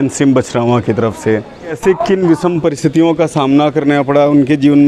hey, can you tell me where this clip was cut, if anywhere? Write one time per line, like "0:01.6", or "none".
0:01.8